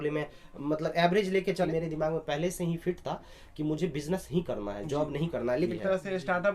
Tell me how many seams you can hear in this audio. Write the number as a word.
two